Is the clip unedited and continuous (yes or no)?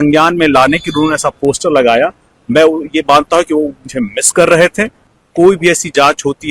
no